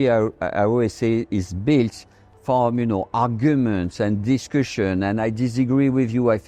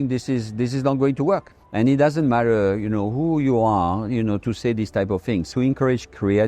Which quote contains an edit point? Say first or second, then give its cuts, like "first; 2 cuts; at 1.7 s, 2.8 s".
second; 2 cuts; at 1.5 s, 5.5 s